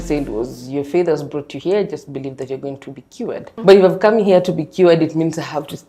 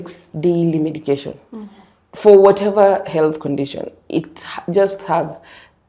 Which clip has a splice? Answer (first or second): first